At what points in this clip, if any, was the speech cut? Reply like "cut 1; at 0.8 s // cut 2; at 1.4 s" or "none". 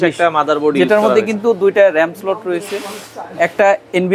none